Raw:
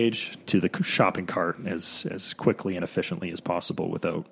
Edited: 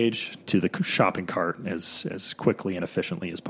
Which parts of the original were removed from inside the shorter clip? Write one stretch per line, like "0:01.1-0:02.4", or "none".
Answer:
none